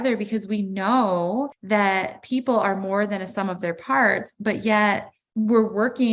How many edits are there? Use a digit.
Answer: 2